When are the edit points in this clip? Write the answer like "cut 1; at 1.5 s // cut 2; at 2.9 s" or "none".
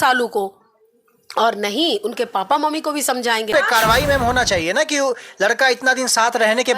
cut 1; at 3.5 s